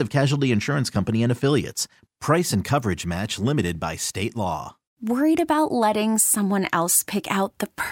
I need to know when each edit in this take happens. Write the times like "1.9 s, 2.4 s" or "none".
5.0 s